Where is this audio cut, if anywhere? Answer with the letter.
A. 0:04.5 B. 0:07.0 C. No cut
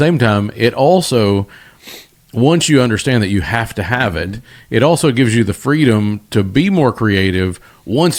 C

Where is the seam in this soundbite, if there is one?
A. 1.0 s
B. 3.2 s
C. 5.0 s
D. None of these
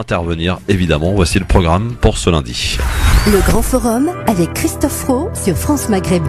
C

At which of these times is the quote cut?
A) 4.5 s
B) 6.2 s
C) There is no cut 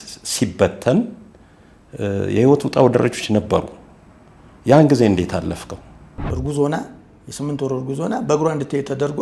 B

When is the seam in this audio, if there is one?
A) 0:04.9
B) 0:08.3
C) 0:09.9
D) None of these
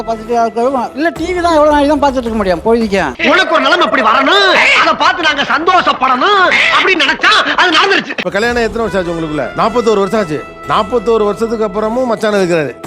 B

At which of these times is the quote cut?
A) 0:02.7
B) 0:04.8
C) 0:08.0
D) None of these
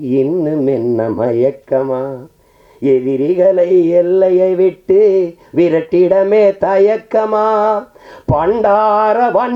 D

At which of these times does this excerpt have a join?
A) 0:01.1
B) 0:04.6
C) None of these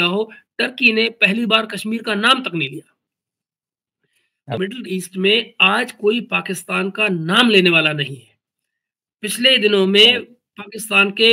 B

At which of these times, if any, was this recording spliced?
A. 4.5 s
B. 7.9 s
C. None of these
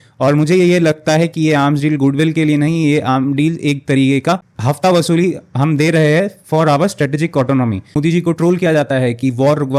B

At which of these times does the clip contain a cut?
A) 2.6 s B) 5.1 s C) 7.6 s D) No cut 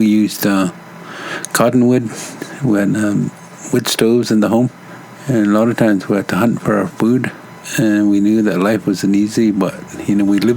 C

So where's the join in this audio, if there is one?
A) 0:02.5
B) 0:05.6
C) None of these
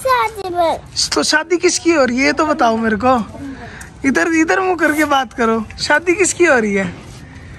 C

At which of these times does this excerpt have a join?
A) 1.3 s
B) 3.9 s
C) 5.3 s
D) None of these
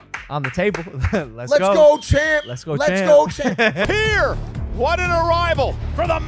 B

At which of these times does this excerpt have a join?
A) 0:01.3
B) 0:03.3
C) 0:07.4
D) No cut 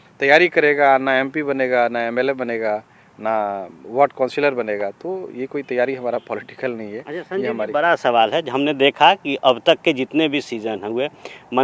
D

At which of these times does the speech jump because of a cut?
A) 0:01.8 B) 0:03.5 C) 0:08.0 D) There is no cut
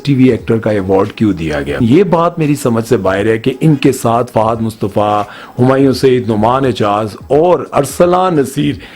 A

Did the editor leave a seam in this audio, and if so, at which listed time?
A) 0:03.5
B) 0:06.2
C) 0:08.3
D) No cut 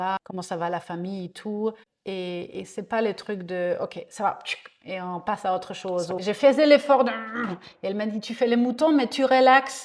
B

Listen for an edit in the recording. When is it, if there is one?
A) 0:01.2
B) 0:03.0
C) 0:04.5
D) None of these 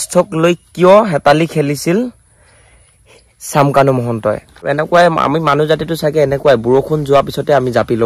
C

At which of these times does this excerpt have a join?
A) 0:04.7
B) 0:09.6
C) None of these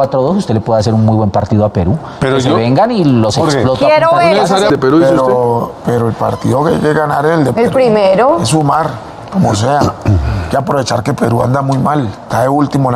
A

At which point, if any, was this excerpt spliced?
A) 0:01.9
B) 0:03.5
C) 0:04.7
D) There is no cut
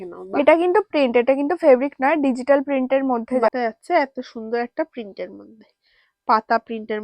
B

